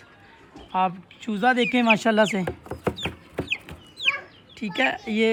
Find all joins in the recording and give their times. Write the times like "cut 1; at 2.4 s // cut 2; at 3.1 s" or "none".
none

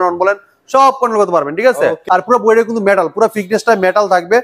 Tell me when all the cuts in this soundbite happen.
cut 1; at 2.0 s

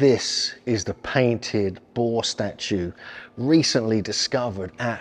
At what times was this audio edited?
none

